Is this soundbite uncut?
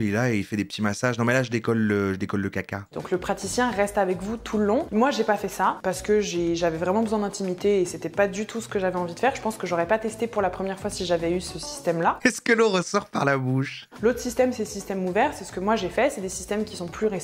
yes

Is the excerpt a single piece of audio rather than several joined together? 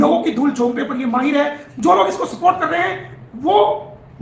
no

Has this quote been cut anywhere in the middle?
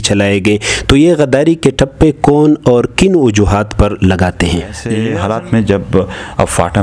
yes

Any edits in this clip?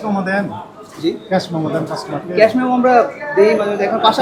no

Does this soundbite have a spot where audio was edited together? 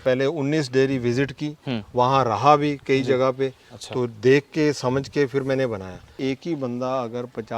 yes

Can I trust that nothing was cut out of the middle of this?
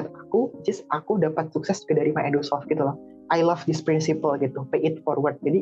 no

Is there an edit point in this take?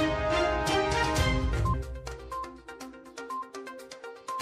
yes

